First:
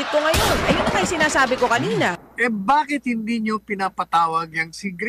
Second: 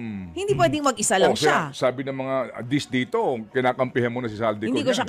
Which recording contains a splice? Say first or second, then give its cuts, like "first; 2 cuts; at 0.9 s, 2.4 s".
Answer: first; 1 cut; at 2.2 s